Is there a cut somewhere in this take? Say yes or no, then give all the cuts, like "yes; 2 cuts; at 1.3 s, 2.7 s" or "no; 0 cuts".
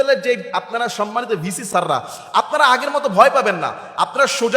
yes; 1 cut; at 1.6 s